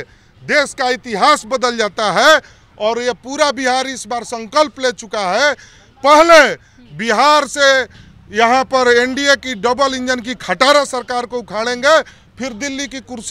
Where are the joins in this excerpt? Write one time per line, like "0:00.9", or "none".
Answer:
none